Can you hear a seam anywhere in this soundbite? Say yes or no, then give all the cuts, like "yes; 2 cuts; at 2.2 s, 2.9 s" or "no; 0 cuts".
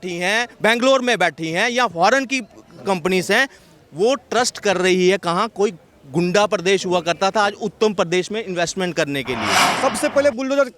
yes; 1 cut; at 9.7 s